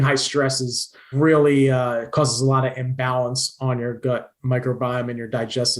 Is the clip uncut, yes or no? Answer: no